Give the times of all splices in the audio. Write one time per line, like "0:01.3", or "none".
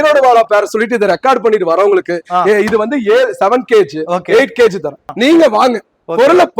0:05.0